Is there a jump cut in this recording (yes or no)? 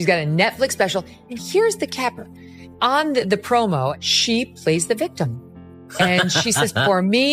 yes